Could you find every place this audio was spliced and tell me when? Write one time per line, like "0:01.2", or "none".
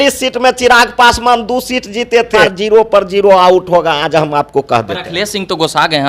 0:02.5